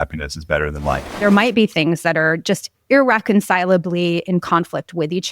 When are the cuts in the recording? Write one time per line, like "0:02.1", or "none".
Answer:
0:01.2